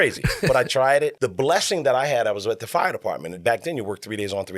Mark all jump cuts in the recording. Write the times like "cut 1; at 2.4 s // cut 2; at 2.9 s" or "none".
cut 1; at 1.2 s // cut 2; at 3.3 s